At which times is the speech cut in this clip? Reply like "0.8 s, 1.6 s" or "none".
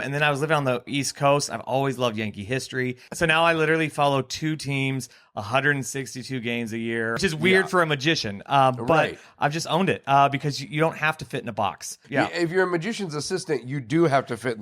0.9 s, 3.0 s, 7.2 s, 12.0 s